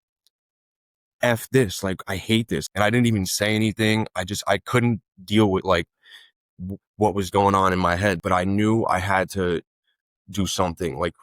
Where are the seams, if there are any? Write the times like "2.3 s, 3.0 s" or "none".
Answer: 2.6 s, 8.2 s